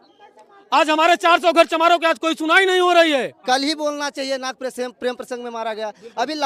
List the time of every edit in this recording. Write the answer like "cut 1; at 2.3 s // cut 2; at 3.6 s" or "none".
cut 1; at 3.4 s